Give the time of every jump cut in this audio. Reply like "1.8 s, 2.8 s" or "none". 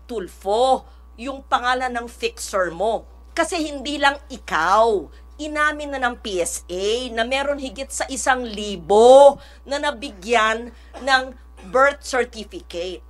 3.2 s